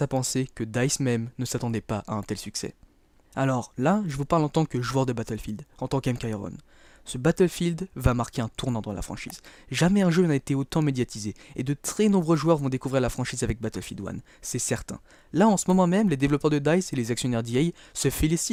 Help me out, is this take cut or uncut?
uncut